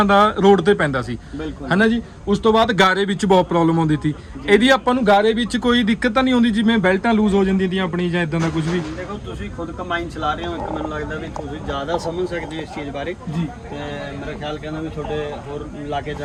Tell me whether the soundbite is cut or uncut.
uncut